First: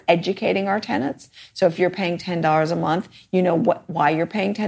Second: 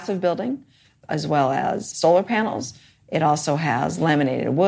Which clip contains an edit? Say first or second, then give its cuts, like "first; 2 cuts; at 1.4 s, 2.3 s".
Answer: second; 2 cuts; at 1.0 s, 1.9 s